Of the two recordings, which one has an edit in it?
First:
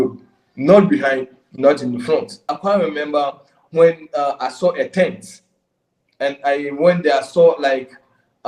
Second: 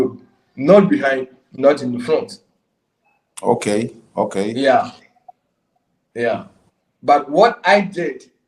first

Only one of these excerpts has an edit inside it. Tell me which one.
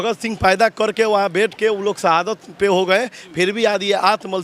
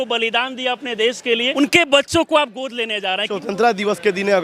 second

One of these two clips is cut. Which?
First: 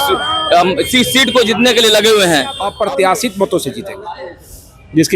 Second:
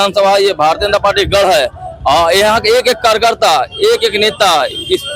first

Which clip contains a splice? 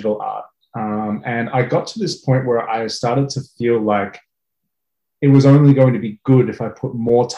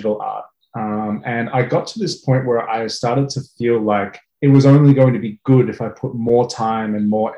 second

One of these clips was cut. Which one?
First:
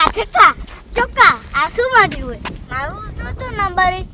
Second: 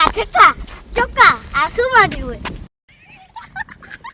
first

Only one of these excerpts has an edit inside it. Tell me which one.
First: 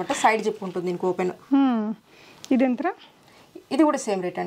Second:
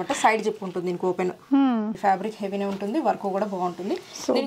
second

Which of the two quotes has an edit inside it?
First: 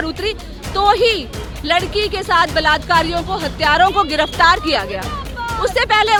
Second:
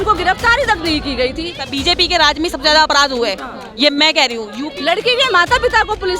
second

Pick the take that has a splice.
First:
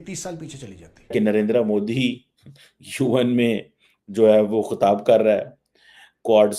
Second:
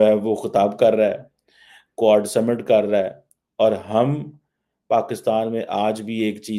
first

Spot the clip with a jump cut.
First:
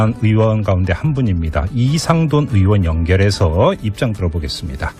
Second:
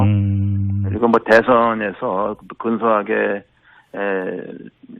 second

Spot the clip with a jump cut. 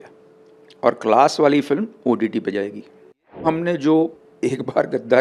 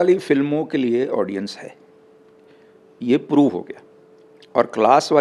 first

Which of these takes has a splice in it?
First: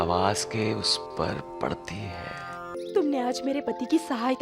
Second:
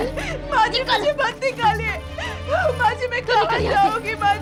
first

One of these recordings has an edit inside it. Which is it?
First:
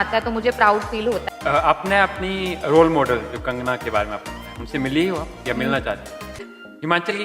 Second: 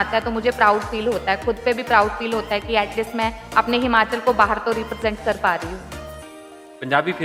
first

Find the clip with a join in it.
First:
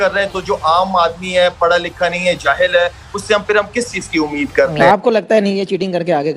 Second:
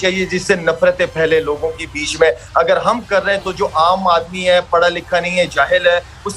first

